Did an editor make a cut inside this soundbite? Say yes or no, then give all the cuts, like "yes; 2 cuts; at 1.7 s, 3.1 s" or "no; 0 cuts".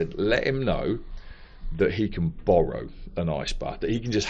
no; 0 cuts